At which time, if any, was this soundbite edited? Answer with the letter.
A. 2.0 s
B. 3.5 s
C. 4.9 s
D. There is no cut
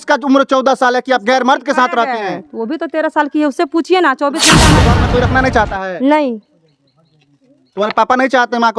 C